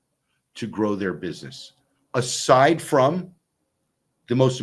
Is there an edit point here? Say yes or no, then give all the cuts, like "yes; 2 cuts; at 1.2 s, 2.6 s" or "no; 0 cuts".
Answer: no; 0 cuts